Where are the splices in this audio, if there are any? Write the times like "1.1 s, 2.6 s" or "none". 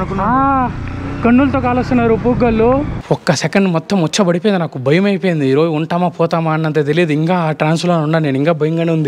2.9 s